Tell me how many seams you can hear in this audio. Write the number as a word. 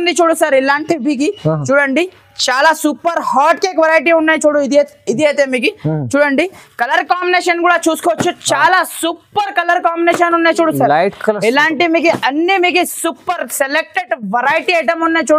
zero